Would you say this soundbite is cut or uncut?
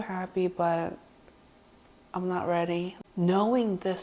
cut